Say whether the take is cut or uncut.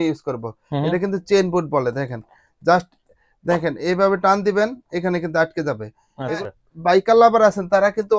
cut